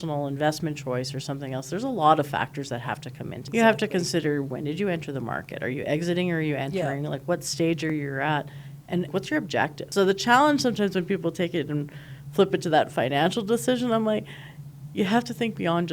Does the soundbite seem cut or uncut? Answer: cut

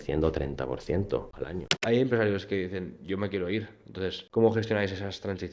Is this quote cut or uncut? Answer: cut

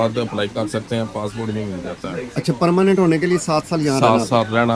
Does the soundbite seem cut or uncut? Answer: uncut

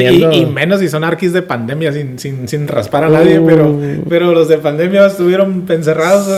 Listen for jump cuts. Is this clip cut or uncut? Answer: uncut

